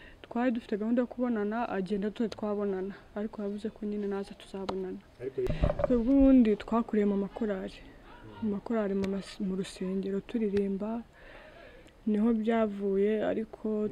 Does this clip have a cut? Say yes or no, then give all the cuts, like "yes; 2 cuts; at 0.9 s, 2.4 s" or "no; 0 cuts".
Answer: yes; 1 cut; at 5.5 s